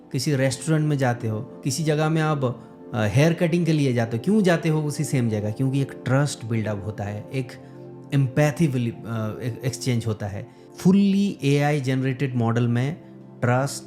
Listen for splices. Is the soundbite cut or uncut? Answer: uncut